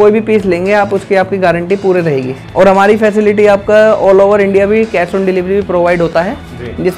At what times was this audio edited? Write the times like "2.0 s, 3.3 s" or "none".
2.4 s